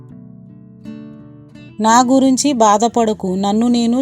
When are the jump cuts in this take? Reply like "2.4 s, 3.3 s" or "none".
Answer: 1.2 s

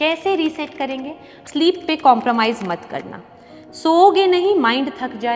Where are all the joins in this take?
1.5 s

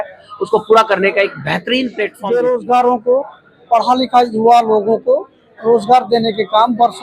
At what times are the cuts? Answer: 2.1 s

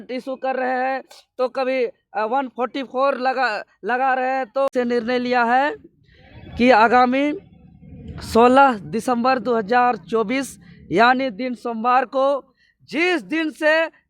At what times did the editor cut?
4.7 s

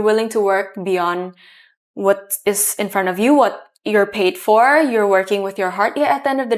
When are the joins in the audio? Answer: none

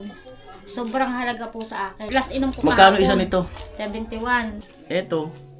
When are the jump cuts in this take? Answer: 2.1 s, 4.6 s

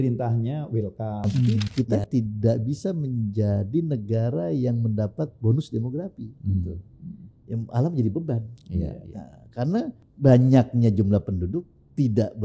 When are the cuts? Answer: 1.5 s, 10.0 s

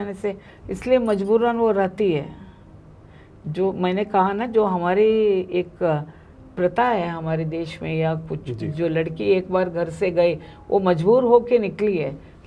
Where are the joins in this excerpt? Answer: none

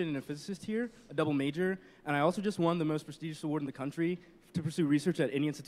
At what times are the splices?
4.3 s

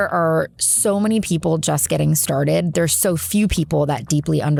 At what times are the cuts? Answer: none

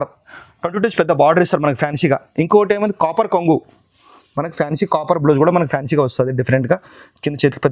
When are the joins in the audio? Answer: none

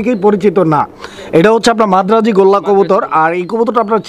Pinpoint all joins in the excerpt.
none

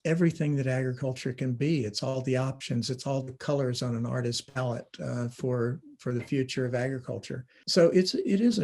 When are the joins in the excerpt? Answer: 7.6 s

